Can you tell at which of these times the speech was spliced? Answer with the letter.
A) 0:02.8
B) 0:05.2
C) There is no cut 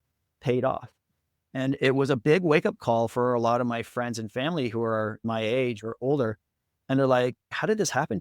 B